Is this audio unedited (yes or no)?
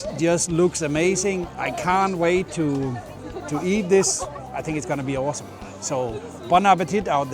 yes